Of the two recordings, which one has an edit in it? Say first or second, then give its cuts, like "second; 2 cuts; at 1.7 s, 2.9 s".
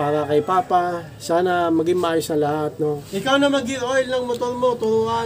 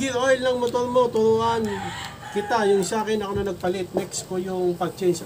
first; 1 cut; at 2.7 s